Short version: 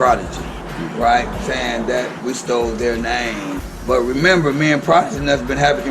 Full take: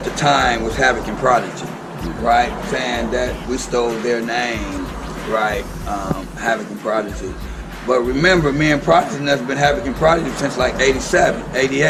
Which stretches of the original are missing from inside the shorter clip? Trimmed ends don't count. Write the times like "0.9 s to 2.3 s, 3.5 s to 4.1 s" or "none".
4.9 s to 7.7 s